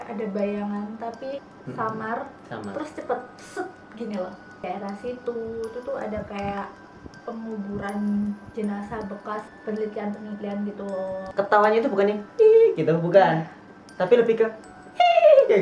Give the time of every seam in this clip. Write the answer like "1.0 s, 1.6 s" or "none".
1.5 s, 4.6 s, 9.5 s, 11.2 s